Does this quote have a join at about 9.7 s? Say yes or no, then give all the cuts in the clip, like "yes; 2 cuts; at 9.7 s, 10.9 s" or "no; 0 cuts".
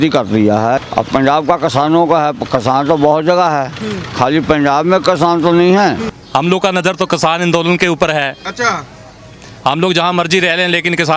no; 2 cuts; at 0.8 s, 6.1 s